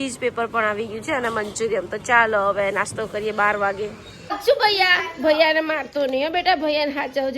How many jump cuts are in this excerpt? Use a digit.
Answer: 1